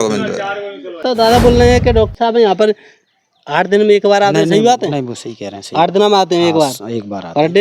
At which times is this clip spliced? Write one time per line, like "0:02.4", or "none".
0:01.0

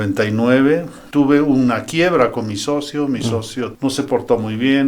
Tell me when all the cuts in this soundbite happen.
0:01.0
0:03.7

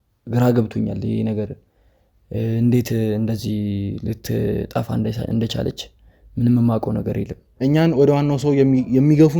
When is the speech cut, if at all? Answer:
0:07.4

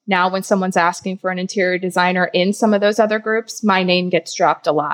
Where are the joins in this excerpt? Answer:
none

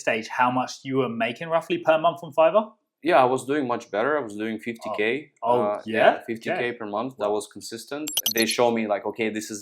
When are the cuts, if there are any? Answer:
0:08.1

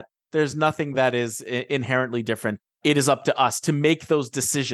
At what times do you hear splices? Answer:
none

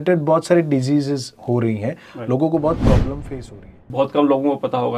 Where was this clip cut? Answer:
0:03.9

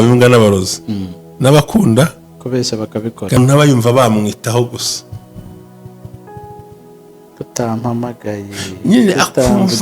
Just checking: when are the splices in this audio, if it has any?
0:03.4

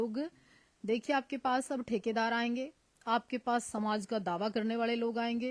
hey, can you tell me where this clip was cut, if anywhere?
none

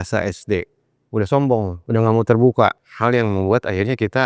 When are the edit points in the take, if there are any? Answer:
0:01.8
0:02.9

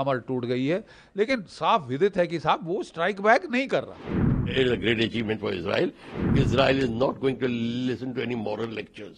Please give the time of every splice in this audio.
0:04.5
0:06.1

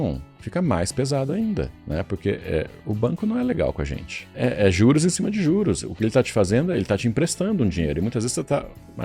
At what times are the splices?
0:01.8
0:02.8
0:04.3

